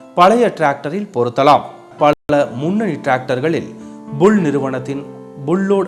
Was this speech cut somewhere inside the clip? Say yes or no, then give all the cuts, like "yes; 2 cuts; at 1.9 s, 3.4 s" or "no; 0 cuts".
yes; 1 cut; at 1.0 s